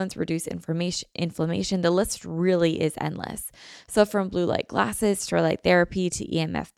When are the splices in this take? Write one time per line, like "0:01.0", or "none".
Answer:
none